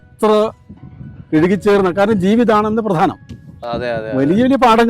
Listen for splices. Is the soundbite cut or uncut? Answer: uncut